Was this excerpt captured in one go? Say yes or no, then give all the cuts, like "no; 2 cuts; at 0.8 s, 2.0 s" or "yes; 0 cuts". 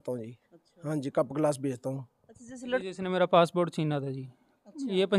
no; 1 cut; at 2.8 s